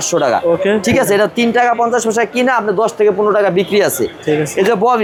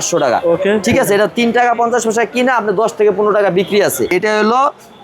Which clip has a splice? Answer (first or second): second